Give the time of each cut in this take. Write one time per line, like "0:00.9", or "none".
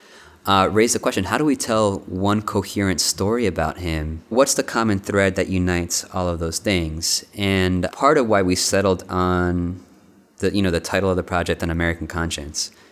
0:04.3
0:07.9